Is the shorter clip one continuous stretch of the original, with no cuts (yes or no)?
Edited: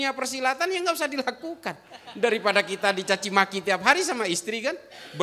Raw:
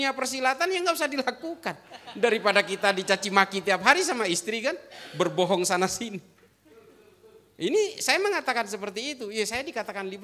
yes